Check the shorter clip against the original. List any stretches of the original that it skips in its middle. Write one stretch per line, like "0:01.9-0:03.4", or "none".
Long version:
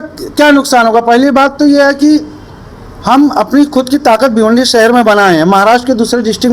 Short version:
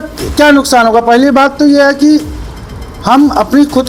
none